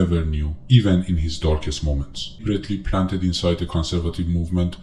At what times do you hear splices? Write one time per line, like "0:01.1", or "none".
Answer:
0:02.4

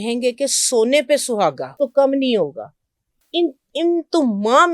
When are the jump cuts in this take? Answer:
0:01.7

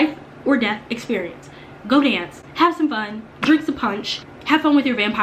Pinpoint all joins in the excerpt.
0:04.3

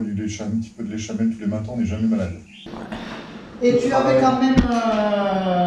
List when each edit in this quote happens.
0:02.8

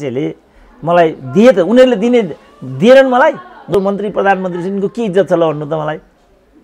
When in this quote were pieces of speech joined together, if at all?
0:03.7

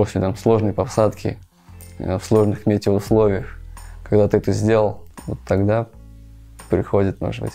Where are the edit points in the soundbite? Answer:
none

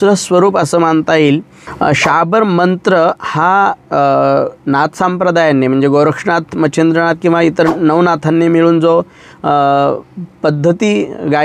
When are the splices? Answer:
0:01.6

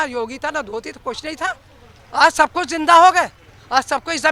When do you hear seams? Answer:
none

